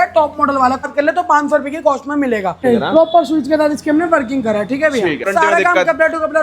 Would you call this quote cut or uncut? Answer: cut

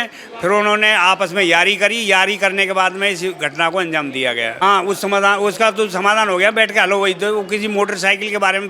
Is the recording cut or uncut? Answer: cut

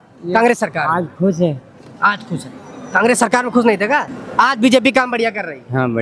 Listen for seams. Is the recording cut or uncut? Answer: cut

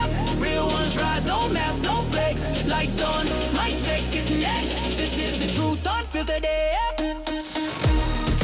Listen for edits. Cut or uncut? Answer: uncut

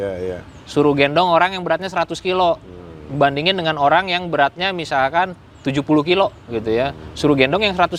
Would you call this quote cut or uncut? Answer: uncut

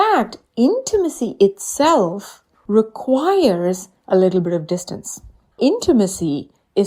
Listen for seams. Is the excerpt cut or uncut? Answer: cut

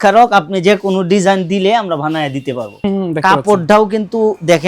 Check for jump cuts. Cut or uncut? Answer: cut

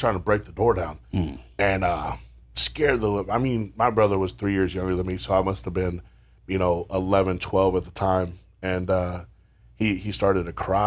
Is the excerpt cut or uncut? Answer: uncut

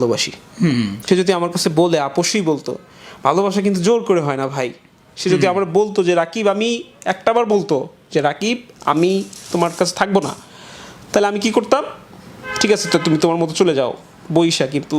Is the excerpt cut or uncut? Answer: cut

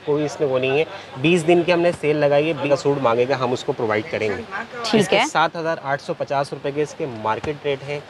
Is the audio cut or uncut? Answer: uncut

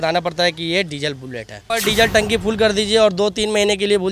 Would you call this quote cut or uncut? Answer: cut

